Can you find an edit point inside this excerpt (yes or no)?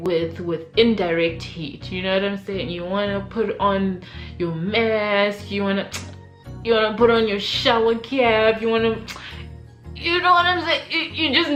no